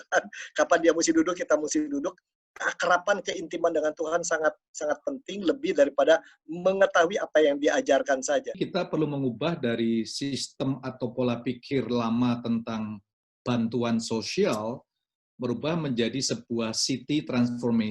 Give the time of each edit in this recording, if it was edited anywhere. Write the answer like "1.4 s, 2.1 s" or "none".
8.6 s